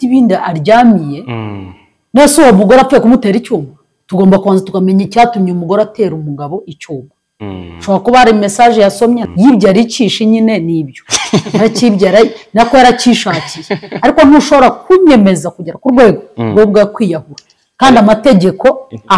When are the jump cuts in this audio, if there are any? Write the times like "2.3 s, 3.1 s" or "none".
9.2 s

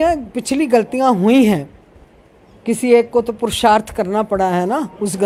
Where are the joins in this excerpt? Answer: none

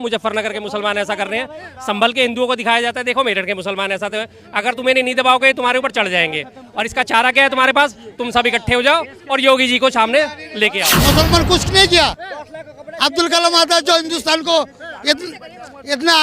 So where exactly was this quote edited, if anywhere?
10.8 s

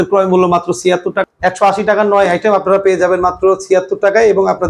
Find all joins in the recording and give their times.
1.2 s

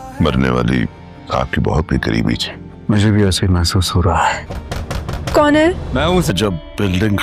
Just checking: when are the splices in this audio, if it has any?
none

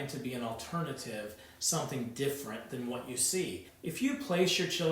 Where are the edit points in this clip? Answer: 3.7 s

